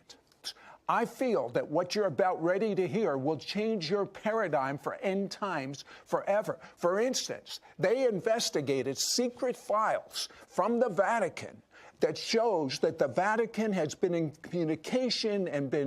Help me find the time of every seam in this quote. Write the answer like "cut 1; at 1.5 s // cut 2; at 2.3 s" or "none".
cut 1; at 2.0 s

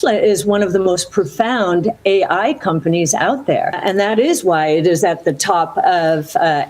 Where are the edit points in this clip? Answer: cut 1; at 3.8 s

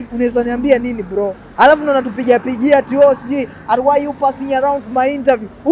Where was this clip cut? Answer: cut 1; at 1.4 s

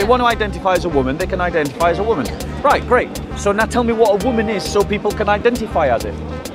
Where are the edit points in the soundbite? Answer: none

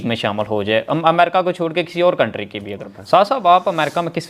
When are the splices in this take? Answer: cut 1; at 2.8 s

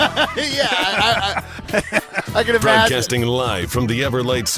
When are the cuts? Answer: cut 1; at 2.9 s

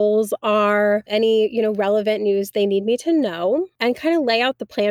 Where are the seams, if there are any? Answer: cut 1; at 1.1 s // cut 2; at 3.7 s

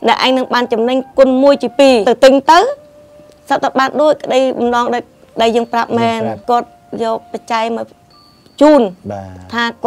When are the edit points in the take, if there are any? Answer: cut 1; at 2.0 s // cut 2; at 6.4 s

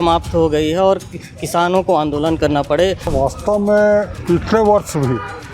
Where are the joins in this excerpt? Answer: cut 1; at 3.1 s

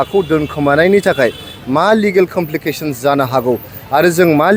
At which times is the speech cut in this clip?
none

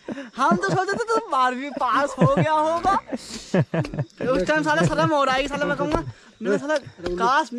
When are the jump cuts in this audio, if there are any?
none

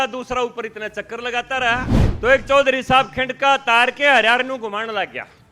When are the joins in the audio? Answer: cut 1; at 2.0 s

